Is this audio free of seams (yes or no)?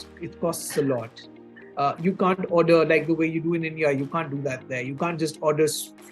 yes